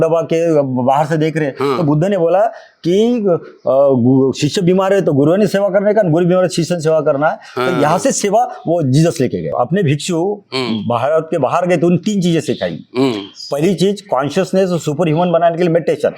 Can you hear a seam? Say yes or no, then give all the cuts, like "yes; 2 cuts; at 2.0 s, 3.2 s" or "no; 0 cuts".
yes; 1 cut; at 9.5 s